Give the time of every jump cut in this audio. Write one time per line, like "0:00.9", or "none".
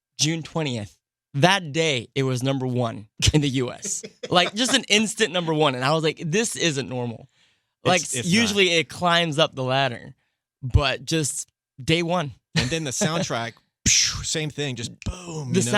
0:03.1